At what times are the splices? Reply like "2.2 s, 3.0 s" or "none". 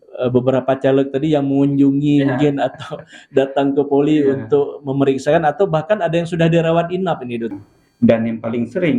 7.6 s